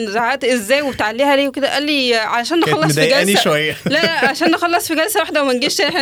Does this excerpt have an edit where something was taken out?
no; 0 cuts

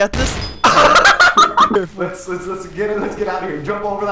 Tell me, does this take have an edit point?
yes; 1 cut; at 1.7 s

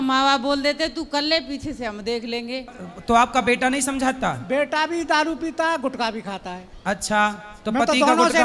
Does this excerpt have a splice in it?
yes; 1 cut; at 2.7 s

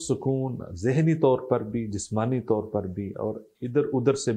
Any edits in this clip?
no; 0 cuts

